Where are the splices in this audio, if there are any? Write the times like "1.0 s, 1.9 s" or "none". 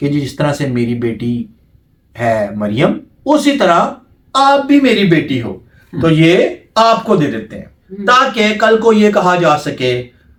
none